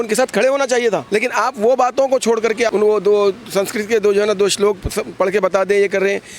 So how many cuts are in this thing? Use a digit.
2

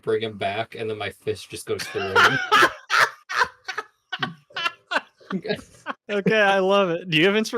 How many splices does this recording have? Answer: 1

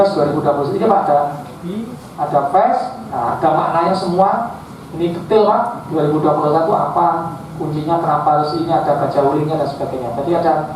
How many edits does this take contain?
0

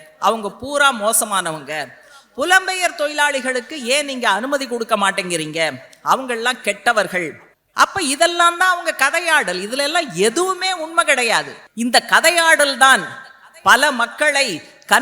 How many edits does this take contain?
1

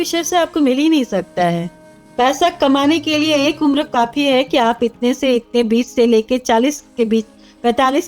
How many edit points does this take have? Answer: 0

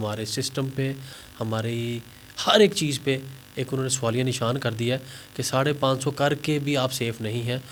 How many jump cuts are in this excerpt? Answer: 0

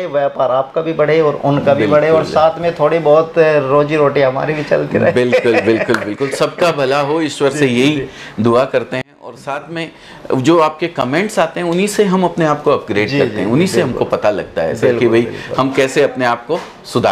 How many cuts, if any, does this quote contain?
0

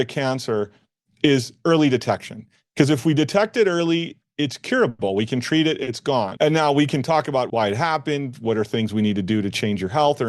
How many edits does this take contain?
2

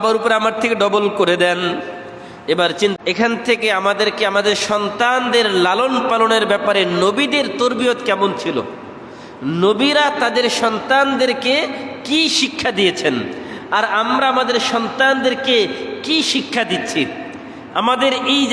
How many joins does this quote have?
1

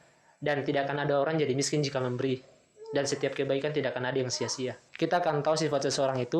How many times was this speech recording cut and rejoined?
1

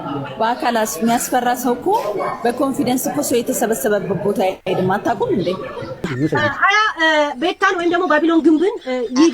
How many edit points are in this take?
1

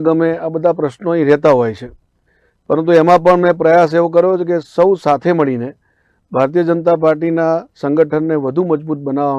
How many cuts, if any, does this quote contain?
0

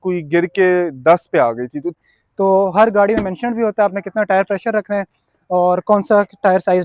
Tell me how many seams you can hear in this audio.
1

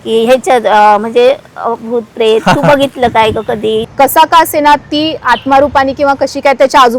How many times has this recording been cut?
1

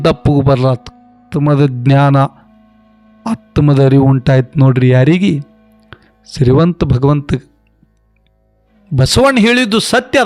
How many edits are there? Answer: 1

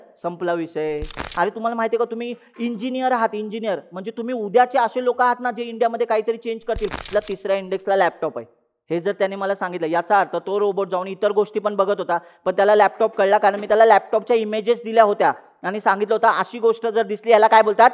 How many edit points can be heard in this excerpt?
2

